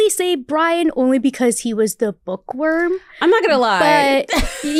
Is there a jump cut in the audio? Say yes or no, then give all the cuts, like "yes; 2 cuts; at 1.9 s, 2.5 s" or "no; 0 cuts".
no; 0 cuts